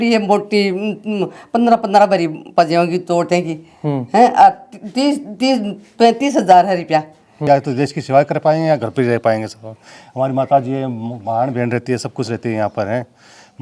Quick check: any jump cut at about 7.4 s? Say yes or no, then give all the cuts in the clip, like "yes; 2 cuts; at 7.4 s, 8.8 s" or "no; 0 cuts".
yes; 1 cut; at 7.4 s